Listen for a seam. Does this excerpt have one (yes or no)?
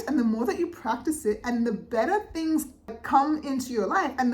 yes